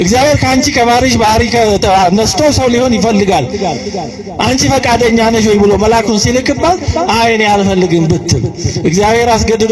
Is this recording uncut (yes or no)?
yes